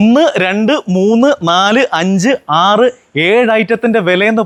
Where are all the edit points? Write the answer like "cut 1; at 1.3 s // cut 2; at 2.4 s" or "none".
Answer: none